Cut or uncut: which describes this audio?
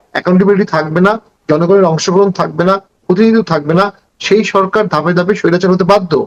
uncut